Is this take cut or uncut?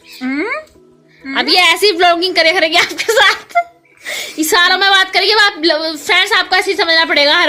uncut